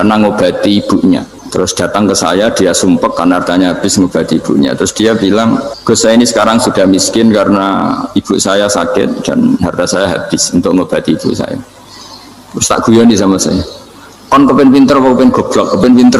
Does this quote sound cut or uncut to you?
cut